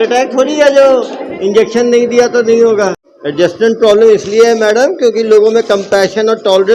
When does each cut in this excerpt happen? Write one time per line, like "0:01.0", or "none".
none